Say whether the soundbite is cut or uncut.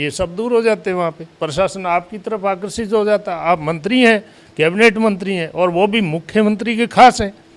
uncut